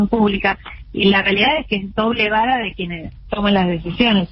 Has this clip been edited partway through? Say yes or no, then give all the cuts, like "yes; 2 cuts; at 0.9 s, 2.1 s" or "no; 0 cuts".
no; 0 cuts